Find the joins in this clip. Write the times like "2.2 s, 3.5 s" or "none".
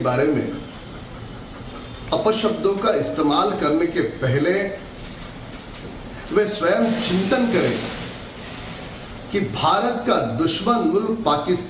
7.6 s